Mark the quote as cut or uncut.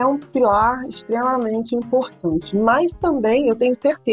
uncut